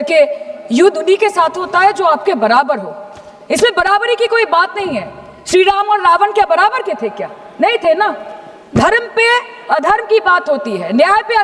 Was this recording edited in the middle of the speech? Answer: no; 0 cuts

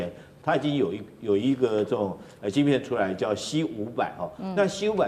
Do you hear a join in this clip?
no; 0 cuts

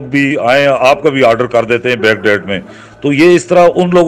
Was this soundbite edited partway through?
no; 0 cuts

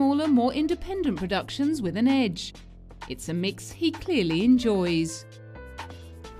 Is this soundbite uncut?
no; 1 cut; at 4.2 s

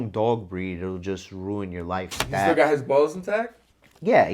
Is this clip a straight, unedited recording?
no; 1 cut; at 2.2 s

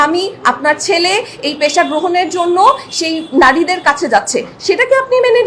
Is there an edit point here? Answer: no; 0 cuts

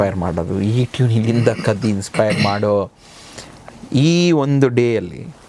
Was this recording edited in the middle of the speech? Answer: no; 0 cuts

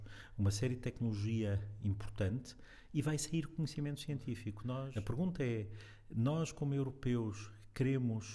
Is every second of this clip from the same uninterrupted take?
no; 1 cut; at 4.9 s

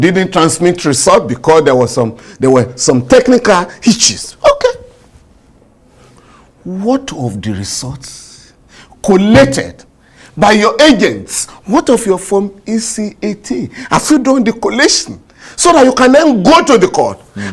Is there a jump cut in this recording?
no; 0 cuts

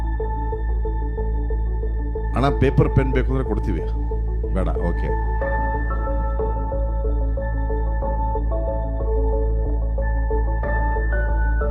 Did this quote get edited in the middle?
no; 0 cuts

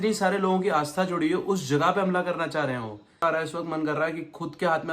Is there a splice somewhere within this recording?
yes; 1 cut; at 3.2 s

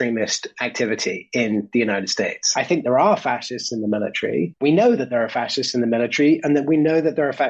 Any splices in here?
yes; 2 cuts; at 2.4 s, 4.5 s

